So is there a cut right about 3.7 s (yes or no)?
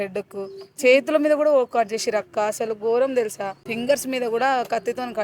yes